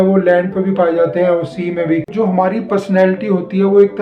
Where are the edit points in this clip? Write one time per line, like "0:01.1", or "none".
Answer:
0:02.1